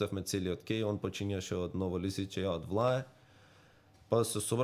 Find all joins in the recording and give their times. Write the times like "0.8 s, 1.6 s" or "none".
none